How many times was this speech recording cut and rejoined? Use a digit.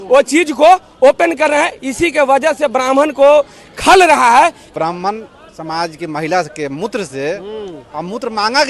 1